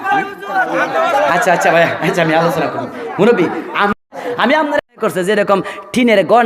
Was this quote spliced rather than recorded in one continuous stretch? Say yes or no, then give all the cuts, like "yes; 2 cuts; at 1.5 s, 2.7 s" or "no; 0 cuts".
yes; 1 cut; at 5.2 s